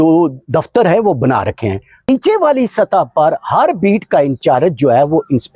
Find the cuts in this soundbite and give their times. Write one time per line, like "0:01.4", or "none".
0:02.1